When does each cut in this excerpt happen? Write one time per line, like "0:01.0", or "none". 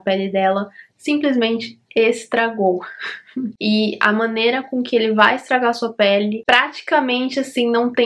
0:03.5